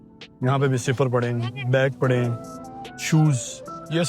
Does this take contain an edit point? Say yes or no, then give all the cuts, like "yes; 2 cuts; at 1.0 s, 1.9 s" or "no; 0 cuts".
no; 0 cuts